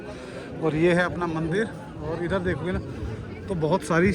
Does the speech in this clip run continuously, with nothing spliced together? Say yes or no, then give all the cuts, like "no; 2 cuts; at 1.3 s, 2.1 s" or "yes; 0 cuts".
yes; 0 cuts